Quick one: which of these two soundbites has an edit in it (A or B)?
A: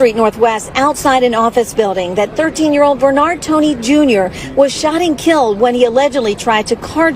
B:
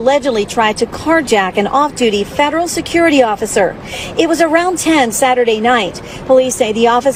A